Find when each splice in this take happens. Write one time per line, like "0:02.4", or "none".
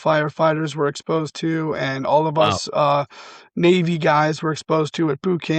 none